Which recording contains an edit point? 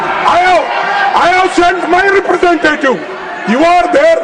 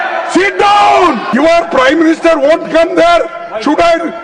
second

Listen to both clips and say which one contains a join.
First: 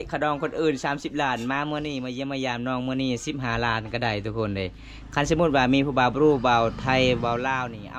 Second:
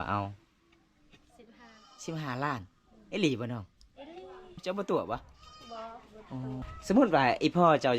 second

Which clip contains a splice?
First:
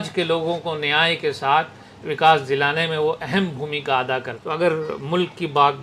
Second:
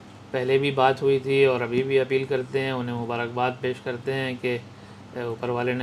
first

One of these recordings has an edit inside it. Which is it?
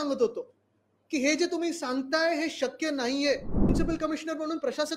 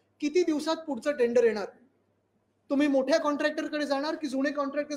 first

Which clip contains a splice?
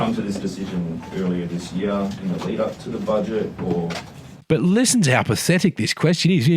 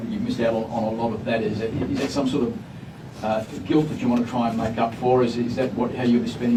first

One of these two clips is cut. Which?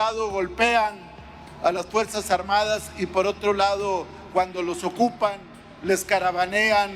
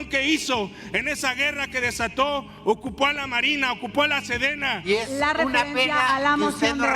second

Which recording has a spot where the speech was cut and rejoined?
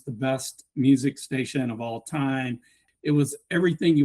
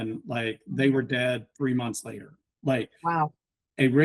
first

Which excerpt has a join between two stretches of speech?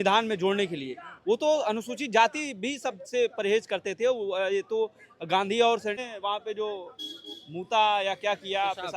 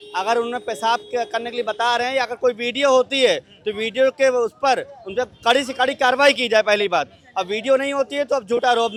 first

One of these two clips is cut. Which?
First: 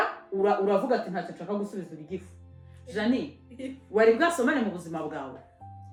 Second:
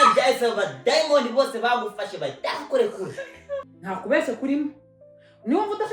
second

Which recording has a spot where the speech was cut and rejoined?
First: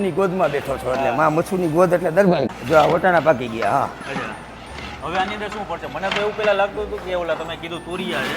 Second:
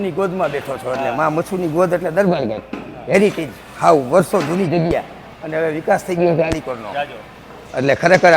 first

